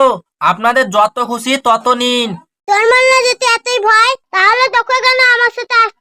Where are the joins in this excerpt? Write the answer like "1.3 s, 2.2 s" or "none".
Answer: 2.5 s